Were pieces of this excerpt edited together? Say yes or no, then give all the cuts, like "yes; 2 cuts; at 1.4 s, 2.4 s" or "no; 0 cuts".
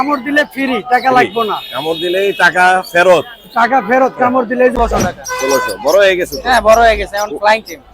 yes; 1 cut; at 4.7 s